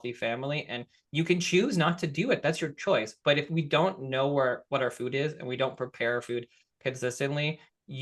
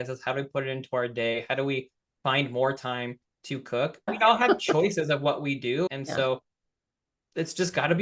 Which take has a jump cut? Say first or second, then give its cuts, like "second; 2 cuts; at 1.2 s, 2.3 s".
second; 2 cuts; at 4.1 s, 5.9 s